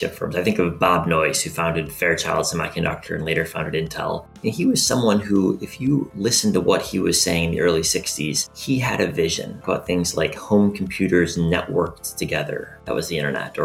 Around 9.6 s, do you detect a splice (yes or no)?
yes